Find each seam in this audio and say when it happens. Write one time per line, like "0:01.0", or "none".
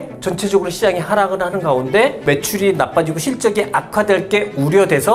none